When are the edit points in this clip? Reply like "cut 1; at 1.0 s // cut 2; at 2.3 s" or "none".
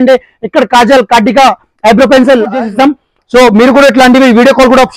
cut 1; at 2.6 s